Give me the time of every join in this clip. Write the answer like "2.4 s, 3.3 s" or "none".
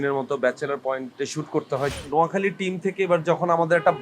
1.1 s, 1.9 s

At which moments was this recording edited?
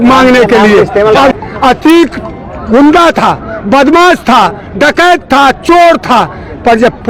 1.3 s

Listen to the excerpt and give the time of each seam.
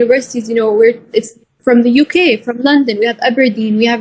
none

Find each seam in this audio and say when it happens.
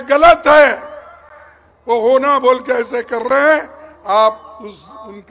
none

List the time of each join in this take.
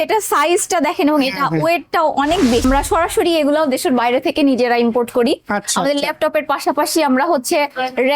2.6 s

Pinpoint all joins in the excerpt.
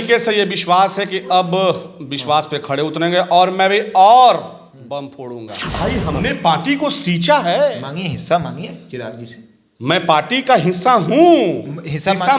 5.8 s

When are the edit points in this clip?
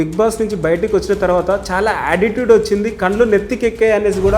none

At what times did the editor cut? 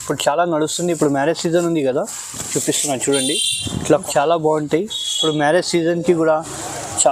4.0 s

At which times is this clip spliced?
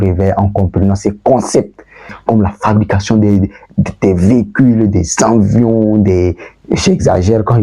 2.2 s

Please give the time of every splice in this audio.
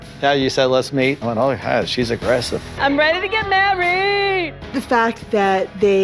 1.2 s, 2.6 s

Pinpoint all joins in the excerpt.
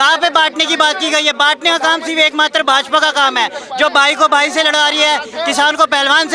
none

